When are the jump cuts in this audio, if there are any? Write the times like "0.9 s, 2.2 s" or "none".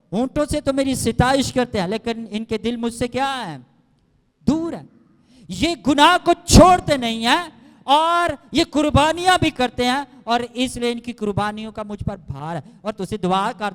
none